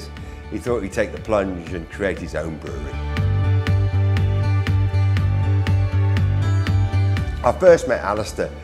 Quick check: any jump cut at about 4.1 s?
no; 1 cut; at 1.9 s

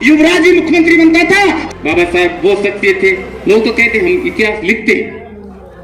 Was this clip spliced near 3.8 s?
no; 1 cut; at 1.6 s

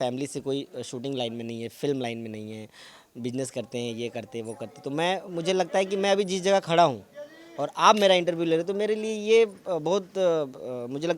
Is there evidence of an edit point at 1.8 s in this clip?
no; 0 cuts

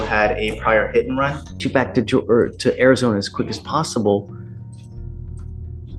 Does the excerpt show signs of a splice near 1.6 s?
yes; 1 cut; at 1.6 s

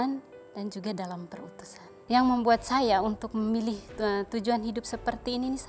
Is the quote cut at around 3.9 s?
no; 1 cut; at 2.0 s

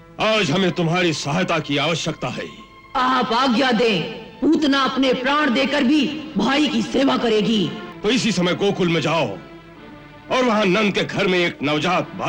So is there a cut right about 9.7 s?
no; 1 cut; at 7.9 s

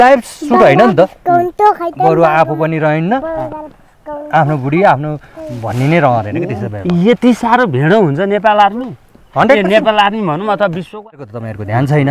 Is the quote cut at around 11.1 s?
yes; 1 cut; at 11.1 s

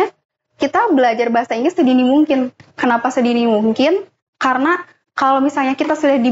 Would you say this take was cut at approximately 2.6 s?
yes; 1 cut; at 2.6 s

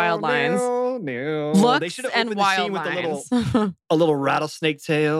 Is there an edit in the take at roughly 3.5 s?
no; 0 cuts

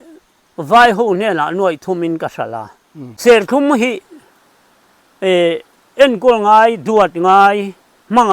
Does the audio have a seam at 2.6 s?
yes; 1 cut; at 2.6 s

